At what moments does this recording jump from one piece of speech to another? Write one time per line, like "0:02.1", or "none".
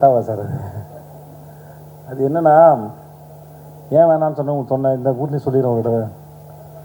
none